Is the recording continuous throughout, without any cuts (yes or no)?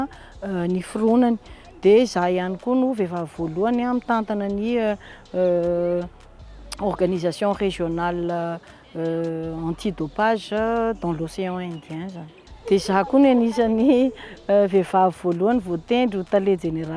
yes